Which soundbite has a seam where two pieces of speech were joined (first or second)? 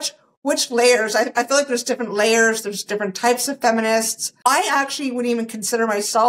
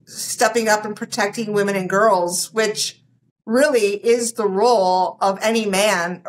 first